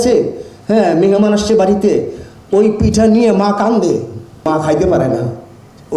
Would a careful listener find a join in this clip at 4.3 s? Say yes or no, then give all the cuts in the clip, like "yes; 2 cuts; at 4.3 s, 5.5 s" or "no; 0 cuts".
yes; 1 cut; at 4.3 s